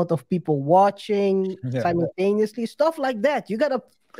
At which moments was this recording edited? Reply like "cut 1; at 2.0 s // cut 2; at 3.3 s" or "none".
none